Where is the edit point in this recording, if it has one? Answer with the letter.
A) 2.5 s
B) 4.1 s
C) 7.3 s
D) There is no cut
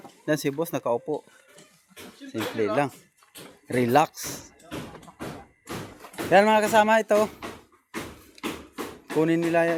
D